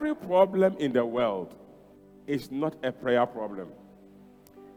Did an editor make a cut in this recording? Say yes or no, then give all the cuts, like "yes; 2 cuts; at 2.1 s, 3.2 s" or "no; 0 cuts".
no; 0 cuts